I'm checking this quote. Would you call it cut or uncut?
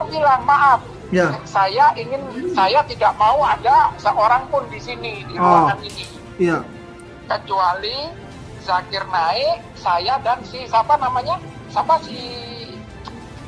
uncut